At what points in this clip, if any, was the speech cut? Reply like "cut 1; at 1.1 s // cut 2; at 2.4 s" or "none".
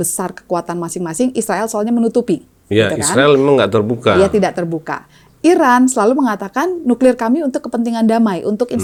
none

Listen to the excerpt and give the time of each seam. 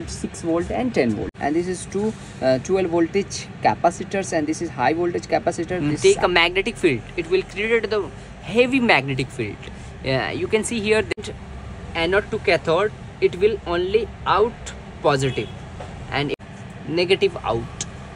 cut 1; at 1.4 s // cut 2; at 5.8 s // cut 3; at 11.1 s // cut 4; at 16.3 s

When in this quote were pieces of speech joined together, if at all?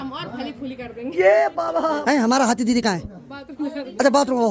cut 1; at 2.0 s

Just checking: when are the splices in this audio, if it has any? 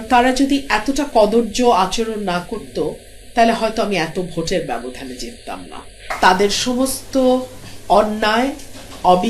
cut 1; at 6.0 s

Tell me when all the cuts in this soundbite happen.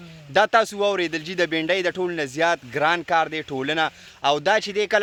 none

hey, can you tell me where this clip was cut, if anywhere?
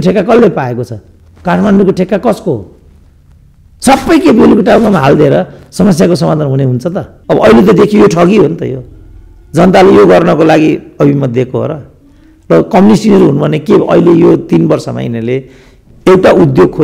cut 1; at 7.1 s

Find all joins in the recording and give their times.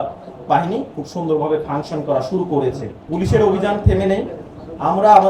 cut 1; at 2.9 s

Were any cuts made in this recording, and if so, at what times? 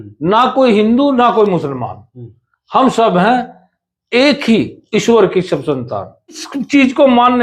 cut 1; at 6.5 s

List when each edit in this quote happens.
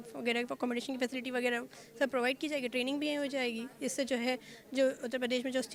none

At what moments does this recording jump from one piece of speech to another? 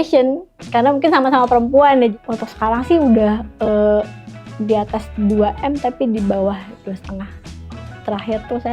cut 1; at 2.1 s

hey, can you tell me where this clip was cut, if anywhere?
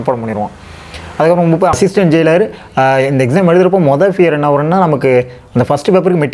cut 1; at 1.7 s

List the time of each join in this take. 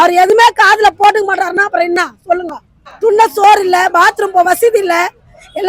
none

